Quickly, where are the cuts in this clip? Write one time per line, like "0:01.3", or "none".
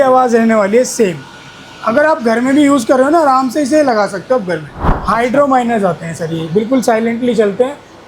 0:04.8

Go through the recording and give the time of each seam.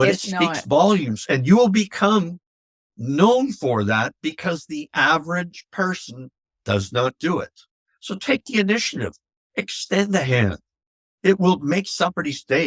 none

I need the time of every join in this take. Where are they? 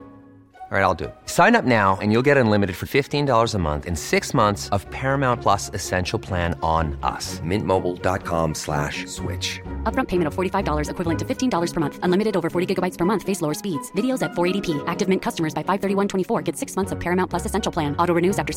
none

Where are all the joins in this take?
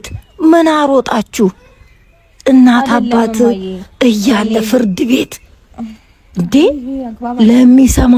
none

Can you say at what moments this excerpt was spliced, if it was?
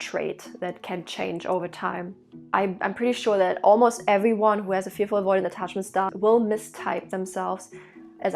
0:02.3

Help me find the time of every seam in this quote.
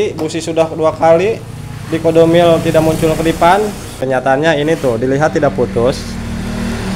0:03.9

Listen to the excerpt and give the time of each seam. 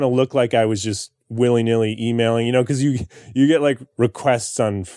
0:03.9

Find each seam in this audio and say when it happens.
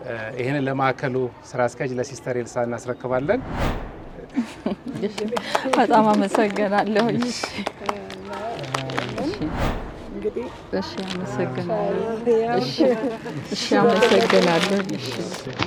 none

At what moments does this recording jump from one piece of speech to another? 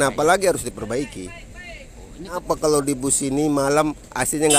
0:02.4

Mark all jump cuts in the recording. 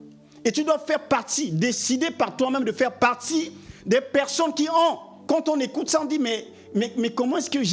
0:05.1

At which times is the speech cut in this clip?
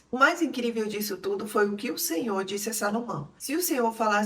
0:03.3

